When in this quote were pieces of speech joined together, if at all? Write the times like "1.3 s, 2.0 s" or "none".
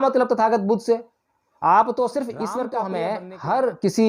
2.7 s

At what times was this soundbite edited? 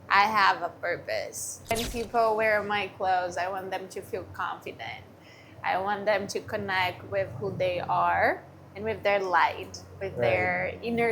1.7 s

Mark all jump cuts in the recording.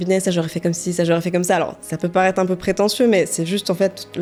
none

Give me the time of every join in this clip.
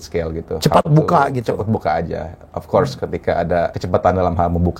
3.8 s

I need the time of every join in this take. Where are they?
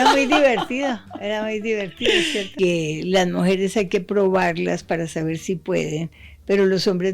2.5 s

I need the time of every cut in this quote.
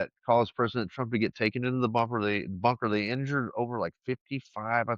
none

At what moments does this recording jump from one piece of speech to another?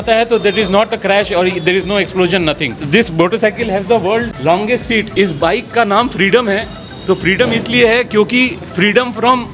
2.8 s, 5.1 s

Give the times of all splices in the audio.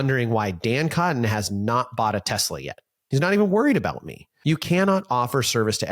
4.3 s

